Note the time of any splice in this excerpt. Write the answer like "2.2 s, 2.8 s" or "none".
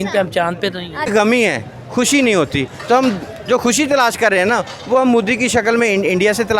1.1 s

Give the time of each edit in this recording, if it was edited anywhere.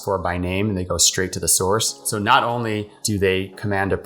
1.9 s, 2.9 s

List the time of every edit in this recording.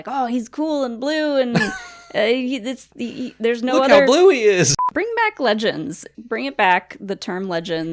4.8 s, 6.1 s

